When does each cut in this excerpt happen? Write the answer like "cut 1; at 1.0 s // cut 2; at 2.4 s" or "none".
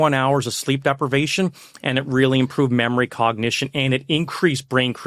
none